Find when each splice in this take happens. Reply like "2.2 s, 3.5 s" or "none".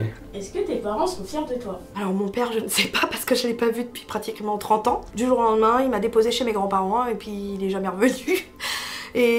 1.9 s, 5.1 s